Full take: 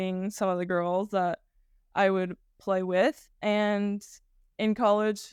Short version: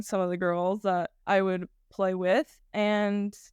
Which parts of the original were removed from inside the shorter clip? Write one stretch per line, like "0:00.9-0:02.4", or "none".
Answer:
0:01.4-0:01.8